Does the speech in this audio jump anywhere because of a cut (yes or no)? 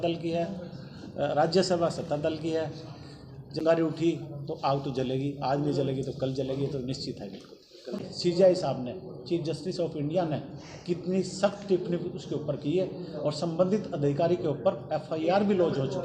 yes